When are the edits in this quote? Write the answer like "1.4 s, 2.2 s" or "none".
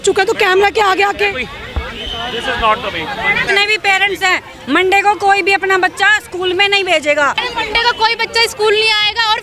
3.4 s, 7.4 s